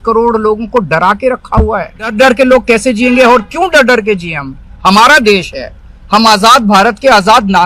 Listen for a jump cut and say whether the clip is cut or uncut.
cut